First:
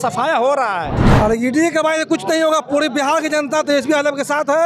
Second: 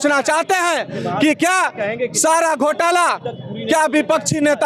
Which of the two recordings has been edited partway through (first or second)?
first